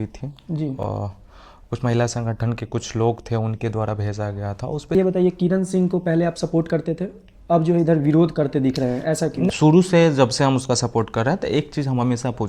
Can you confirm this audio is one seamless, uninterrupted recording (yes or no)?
no